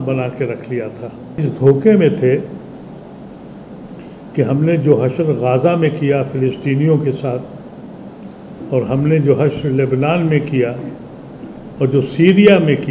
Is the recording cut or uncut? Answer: cut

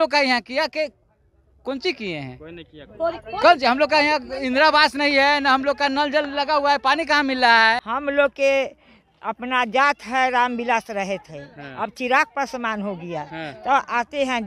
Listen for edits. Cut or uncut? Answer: cut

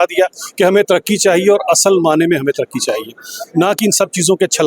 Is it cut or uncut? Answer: uncut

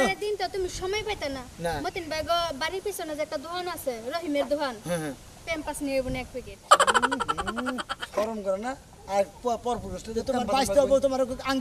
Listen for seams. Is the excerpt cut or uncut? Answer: uncut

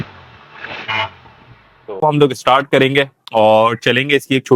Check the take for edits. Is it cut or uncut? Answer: cut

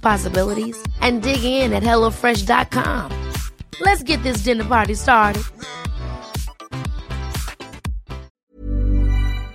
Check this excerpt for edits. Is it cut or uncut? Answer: cut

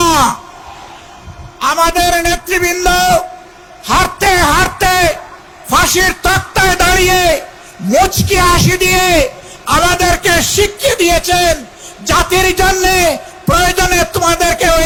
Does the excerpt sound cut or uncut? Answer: uncut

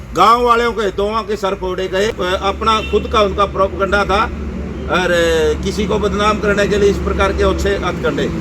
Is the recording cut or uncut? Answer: cut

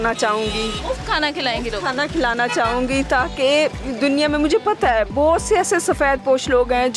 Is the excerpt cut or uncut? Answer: uncut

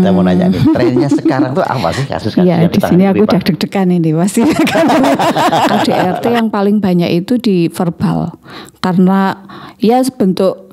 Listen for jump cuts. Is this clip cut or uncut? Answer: cut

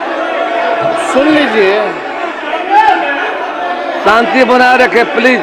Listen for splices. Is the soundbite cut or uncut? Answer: uncut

